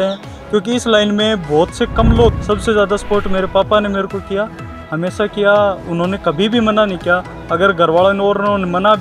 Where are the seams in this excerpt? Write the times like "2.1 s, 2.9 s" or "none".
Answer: 2.3 s